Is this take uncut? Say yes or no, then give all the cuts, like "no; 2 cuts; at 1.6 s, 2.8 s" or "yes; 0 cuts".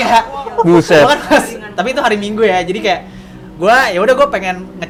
yes; 0 cuts